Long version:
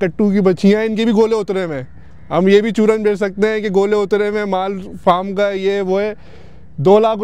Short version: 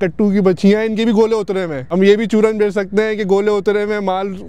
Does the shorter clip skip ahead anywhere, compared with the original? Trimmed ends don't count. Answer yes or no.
yes